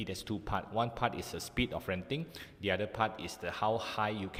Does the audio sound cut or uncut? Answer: uncut